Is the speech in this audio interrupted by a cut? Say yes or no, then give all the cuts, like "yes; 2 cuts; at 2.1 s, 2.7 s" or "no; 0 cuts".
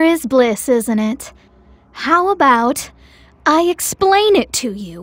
no; 0 cuts